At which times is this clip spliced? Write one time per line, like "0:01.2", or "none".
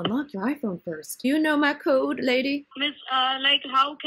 0:01.2
0:02.7